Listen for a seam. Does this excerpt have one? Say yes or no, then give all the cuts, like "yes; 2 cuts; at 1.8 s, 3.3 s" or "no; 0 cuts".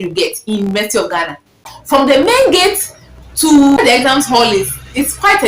yes; 2 cuts; at 1.7 s, 3.8 s